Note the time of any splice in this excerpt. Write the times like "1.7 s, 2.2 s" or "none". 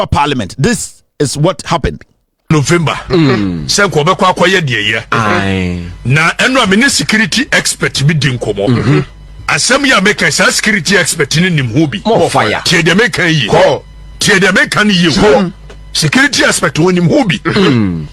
none